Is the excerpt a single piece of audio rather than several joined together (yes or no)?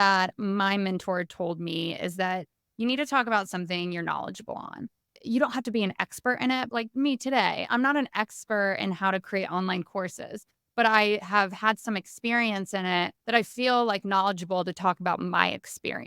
no